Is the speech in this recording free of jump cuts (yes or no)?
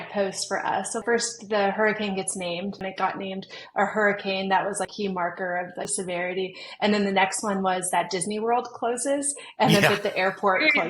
no